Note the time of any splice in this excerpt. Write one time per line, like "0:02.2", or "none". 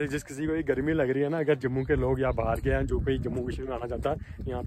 none